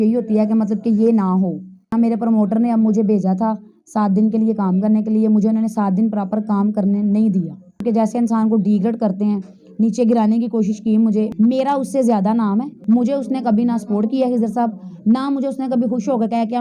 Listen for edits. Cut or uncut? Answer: cut